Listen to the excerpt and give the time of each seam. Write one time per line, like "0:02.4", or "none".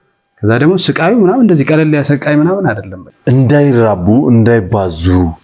0:03.1